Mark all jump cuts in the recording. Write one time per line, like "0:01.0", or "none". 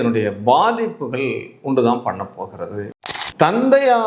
0:02.8